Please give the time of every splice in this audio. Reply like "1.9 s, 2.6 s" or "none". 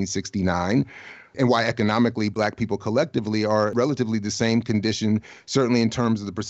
3.7 s